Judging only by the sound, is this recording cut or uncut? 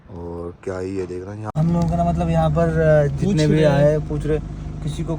cut